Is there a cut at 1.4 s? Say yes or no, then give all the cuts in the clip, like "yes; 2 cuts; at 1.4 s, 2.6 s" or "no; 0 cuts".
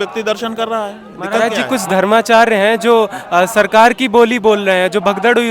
yes; 1 cut; at 1.4 s